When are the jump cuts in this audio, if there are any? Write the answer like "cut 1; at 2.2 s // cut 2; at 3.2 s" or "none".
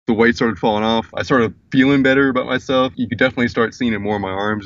cut 1; at 1.1 s